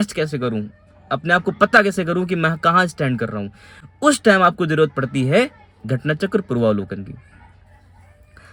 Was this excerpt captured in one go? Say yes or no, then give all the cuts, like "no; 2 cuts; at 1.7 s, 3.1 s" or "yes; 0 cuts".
yes; 0 cuts